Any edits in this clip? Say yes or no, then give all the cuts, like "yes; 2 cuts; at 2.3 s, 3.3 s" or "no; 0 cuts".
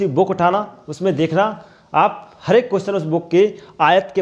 no; 0 cuts